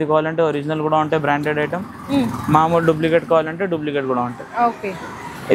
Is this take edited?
no; 0 cuts

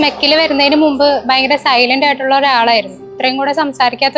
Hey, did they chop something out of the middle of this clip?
no; 0 cuts

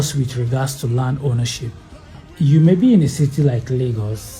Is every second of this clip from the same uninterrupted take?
no; 1 cut; at 2.2 s

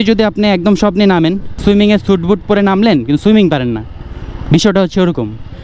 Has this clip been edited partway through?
yes; 1 cut; at 1.6 s

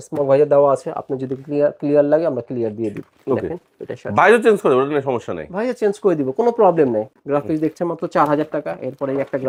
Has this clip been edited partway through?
no; 0 cuts

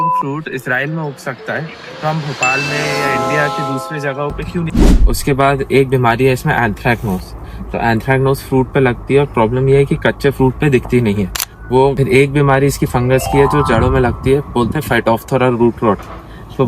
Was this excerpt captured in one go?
no; 2 cuts; at 4.7 s, 12.0 s

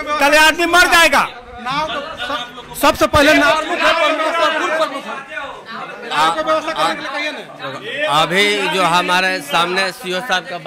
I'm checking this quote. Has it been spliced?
no; 0 cuts

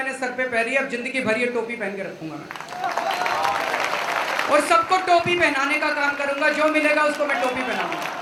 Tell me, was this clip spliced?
no; 0 cuts

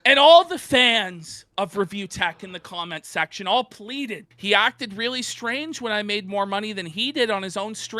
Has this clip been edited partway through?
yes; 1 cut; at 4.3 s

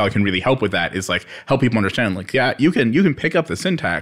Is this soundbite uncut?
yes; 0 cuts

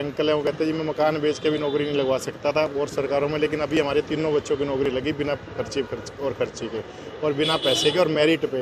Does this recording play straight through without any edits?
yes; 0 cuts

